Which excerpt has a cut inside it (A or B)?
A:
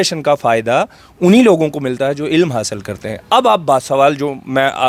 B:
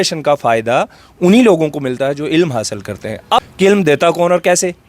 B